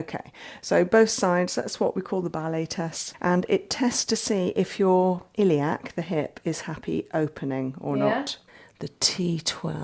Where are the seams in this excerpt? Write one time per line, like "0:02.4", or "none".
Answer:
0:03.0
0:08.4